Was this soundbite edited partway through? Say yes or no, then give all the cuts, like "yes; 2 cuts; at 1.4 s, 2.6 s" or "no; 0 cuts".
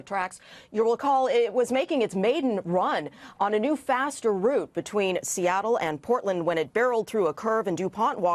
no; 0 cuts